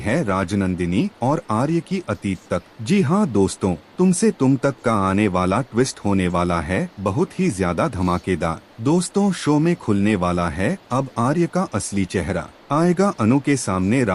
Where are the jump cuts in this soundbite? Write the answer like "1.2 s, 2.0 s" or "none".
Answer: 2.7 s, 3.8 s, 8.7 s, 12.5 s